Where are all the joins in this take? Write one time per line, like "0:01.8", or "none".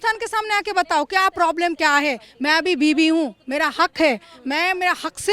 none

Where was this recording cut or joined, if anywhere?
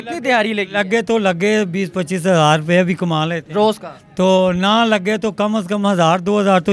none

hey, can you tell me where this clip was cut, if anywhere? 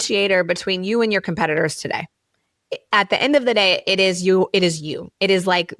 none

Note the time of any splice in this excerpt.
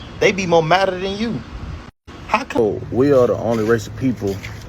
0:02.6

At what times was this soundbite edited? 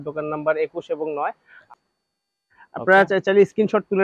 0:01.5

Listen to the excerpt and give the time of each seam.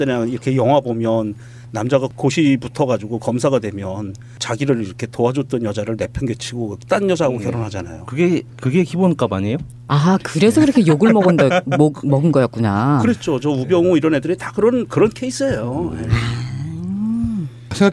0:14.5

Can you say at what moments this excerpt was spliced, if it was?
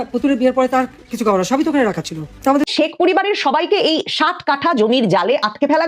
0:02.7

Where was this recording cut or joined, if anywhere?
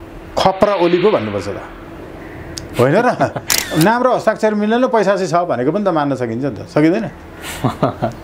0:03.6

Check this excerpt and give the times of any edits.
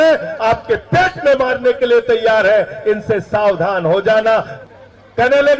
0:04.5

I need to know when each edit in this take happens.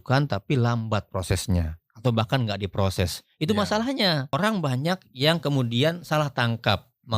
0:04.2

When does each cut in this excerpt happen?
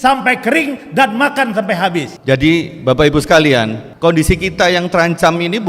0:02.1
0:03.8

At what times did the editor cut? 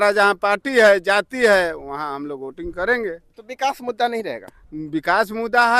none

